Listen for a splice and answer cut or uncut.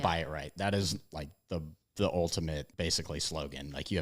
cut